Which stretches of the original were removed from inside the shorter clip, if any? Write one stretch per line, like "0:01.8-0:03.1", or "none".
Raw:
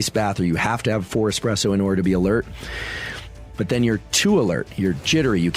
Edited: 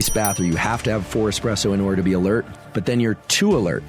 0:02.6-0:03.4